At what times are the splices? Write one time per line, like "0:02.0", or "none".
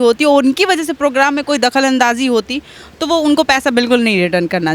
none

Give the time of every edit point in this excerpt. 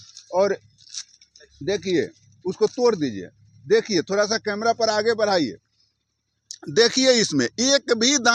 none

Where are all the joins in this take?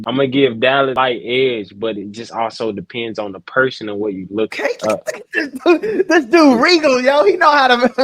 0:01.0
0:04.5

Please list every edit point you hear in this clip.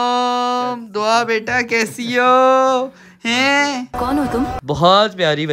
0:04.6

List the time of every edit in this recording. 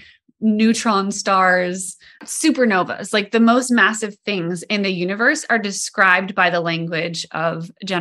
0:02.2

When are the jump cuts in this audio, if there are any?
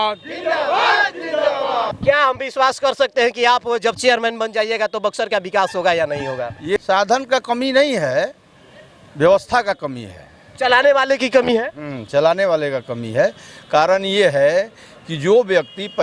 0:01.9
0:06.8

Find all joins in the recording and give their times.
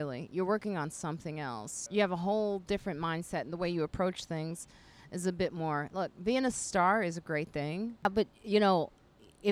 0:01.9
0:08.0

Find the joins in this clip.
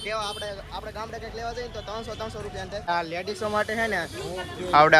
0:02.8

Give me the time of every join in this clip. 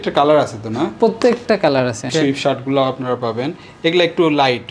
0:02.1

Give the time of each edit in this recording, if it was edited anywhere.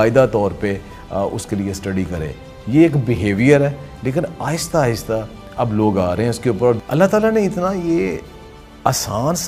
0:06.8

